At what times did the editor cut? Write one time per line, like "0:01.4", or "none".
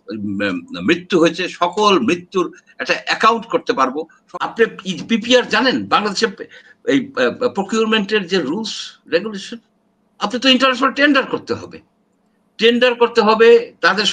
0:04.2